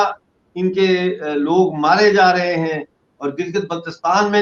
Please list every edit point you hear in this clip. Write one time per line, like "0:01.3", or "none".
none